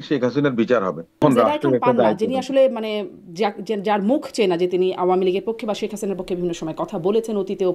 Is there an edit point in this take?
yes; 1 cut; at 1.2 s

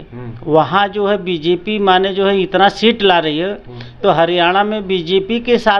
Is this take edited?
no; 0 cuts

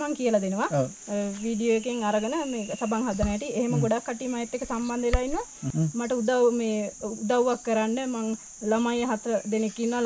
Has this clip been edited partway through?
yes; 1 cut; at 5.7 s

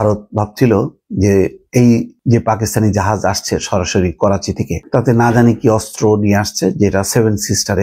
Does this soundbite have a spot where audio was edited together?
yes; 2 cuts; at 2.1 s, 4.8 s

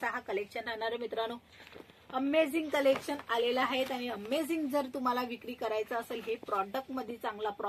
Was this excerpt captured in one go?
yes; 0 cuts

